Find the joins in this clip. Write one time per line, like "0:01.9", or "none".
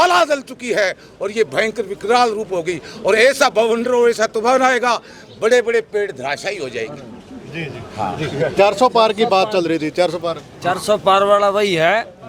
none

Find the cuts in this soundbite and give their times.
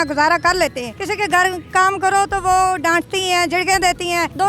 none

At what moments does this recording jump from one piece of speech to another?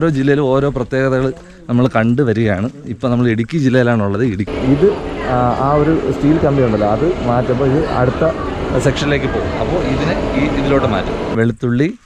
0:04.5
0:11.3

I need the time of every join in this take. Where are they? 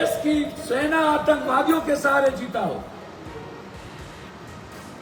none

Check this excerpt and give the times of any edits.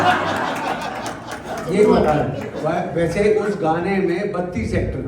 none

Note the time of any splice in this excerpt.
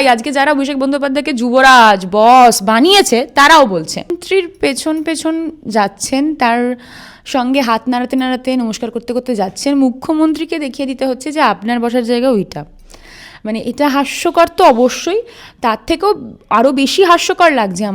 0:04.2

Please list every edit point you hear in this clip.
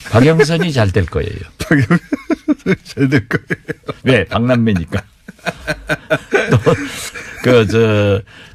0:02.7

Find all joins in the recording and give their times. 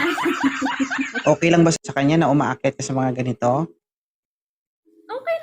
0:01.7

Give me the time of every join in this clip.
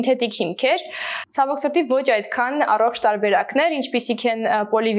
none

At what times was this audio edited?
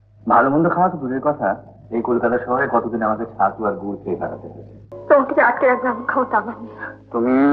0:04.9

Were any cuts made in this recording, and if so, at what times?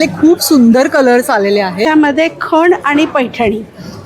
0:01.8

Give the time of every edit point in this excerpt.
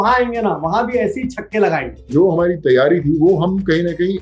0:02.0

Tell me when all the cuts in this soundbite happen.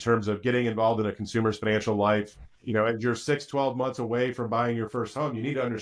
0:02.5

